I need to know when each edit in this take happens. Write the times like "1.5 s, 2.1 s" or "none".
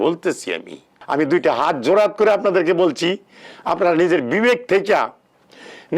0.9 s